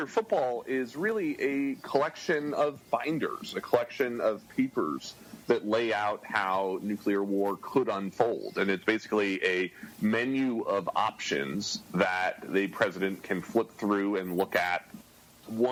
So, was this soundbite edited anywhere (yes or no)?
no